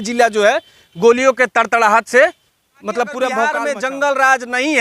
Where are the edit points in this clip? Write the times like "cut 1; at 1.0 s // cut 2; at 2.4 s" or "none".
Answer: cut 1; at 3.6 s